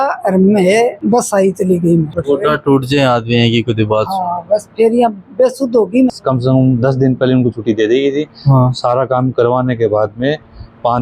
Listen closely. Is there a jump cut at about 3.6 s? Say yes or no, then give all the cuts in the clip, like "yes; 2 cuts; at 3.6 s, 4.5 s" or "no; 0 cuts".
no; 2 cuts; at 2.1 s, 6.1 s